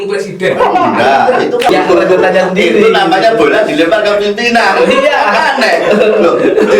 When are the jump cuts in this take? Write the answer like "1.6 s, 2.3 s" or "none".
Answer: 1.7 s